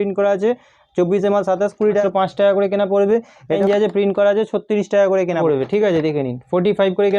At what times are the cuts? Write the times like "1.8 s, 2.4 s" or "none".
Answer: 2.0 s, 3.6 s, 5.4 s

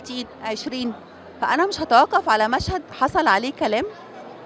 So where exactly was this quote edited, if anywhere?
none

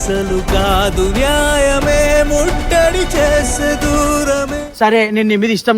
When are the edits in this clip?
4.6 s

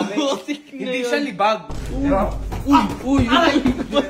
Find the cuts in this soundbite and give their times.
1.8 s

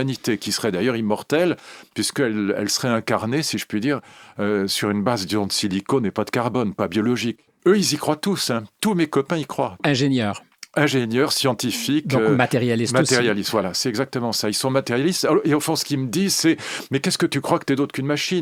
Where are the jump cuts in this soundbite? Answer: 7.5 s, 9.8 s

